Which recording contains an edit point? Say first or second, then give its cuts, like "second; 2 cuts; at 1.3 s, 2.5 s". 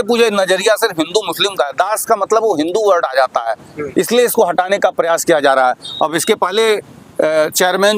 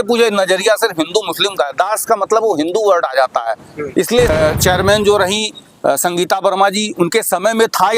second; 1 cut; at 4.3 s